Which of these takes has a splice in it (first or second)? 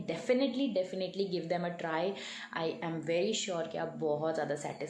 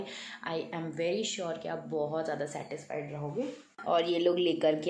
second